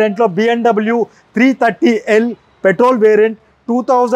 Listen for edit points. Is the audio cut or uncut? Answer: uncut